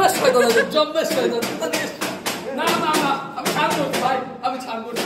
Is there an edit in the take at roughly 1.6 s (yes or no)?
no